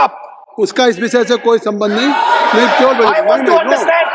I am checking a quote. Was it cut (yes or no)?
no